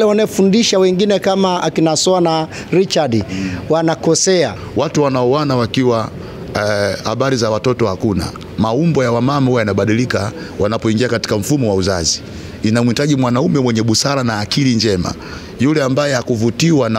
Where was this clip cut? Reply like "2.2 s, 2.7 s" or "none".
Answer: 4.6 s